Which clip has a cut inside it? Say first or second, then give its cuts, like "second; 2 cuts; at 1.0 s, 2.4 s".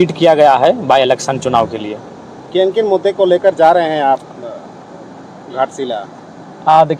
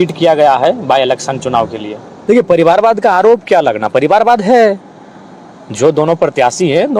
second; 1 cut; at 2.1 s